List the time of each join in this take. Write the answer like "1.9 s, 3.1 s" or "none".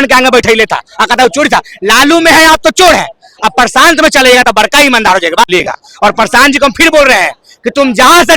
5.5 s

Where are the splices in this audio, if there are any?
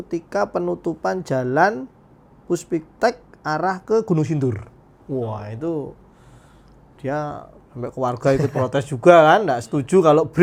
none

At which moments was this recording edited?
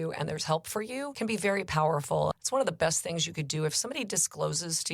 1.1 s, 2.3 s

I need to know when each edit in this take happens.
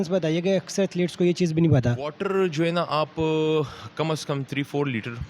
2.0 s

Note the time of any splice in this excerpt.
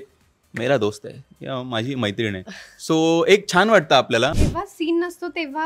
4.3 s

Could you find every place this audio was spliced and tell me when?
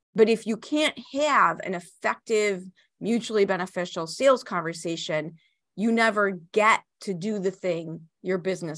none

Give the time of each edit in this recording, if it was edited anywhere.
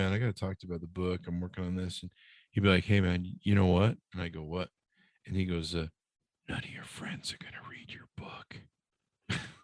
none

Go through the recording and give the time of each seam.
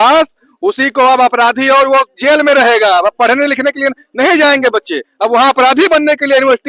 none

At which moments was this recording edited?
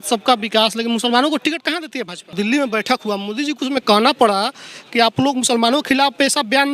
2.3 s

